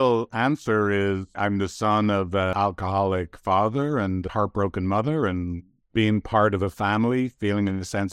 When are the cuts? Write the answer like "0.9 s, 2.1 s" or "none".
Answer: 1.3 s, 2.5 s